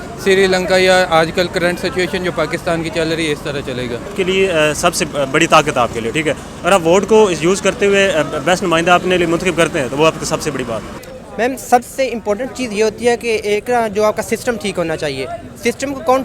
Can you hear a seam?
yes; 2 cuts; at 4.1 s, 11.0 s

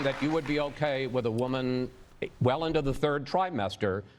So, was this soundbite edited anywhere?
no; 0 cuts

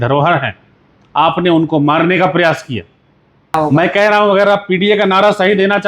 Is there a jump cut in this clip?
yes; 1 cut; at 3.5 s

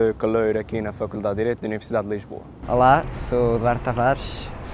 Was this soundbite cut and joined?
yes; 1 cut; at 2.5 s

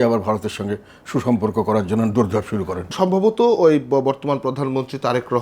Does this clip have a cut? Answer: no; 0 cuts

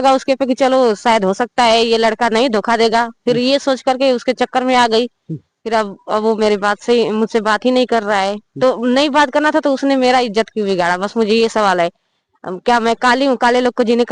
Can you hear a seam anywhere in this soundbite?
no; 0 cuts

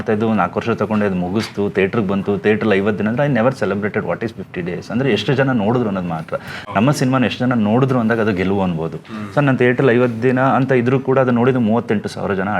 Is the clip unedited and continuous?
yes; 0 cuts

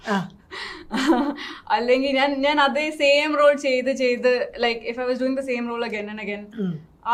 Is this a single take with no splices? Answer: yes; 0 cuts

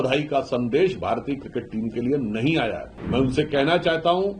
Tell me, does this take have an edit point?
yes; 1 cut; at 2.9 s

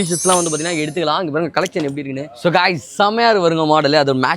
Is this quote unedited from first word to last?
no; 1 cut; at 2.3 s

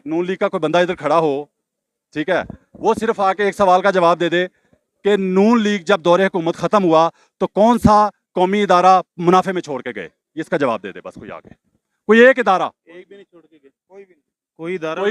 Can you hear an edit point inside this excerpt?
no; 0 cuts

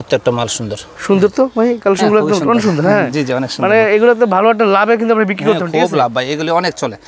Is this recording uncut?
yes; 0 cuts

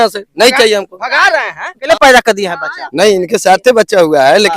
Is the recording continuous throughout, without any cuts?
no; 1 cut; at 1.8 s

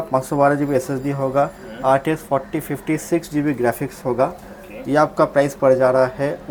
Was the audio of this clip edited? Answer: no; 0 cuts

